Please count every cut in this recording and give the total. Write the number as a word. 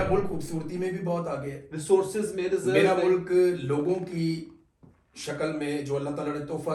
zero